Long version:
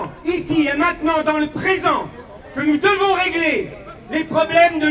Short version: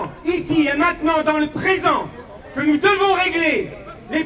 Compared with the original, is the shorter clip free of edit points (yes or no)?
yes